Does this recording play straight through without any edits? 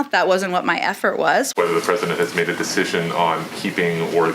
no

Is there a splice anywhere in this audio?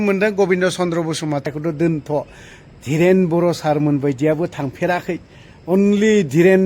yes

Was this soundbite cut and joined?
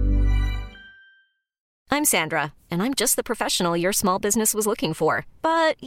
yes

